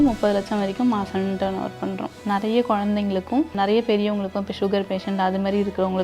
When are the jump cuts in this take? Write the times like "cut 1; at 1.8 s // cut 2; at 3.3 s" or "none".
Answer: cut 1; at 2.2 s // cut 2; at 3.5 s